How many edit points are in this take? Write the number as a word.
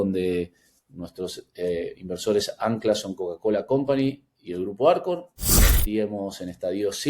zero